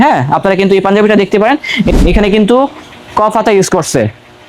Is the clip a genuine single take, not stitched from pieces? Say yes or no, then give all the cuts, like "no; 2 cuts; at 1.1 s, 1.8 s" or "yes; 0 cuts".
no; 1 cut; at 2.0 s